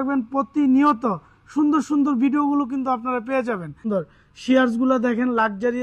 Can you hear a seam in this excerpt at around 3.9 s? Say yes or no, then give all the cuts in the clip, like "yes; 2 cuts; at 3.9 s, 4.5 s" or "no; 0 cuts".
yes; 1 cut; at 3.9 s